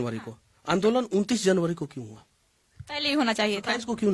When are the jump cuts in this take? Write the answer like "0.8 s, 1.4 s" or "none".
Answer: none